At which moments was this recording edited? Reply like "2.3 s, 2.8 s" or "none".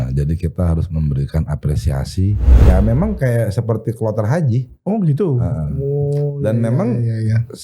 2.7 s

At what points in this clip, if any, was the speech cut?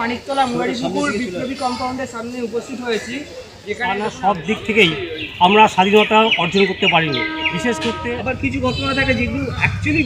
3.9 s, 8.0 s

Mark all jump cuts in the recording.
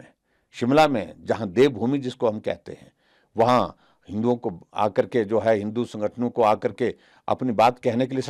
none

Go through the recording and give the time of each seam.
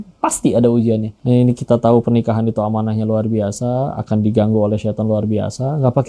1.1 s

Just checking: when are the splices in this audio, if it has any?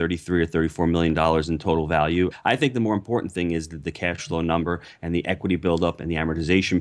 2.3 s

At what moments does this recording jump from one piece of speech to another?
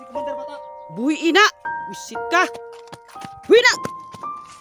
0.9 s

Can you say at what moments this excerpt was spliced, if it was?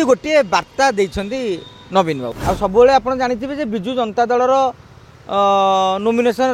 2.3 s

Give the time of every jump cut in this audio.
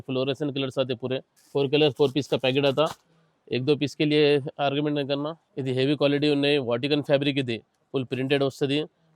1.3 s, 5.4 s

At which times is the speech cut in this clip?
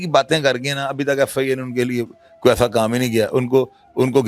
none

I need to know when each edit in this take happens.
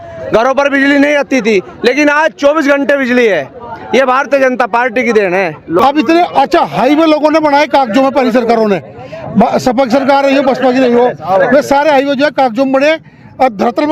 5.7 s

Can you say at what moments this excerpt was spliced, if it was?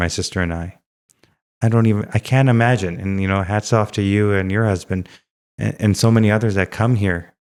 none

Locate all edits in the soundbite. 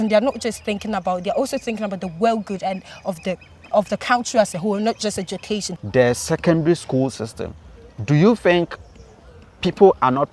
5.8 s

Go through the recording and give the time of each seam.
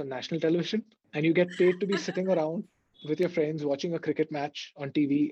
1.0 s

